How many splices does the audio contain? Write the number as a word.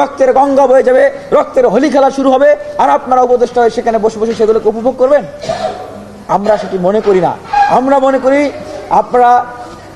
zero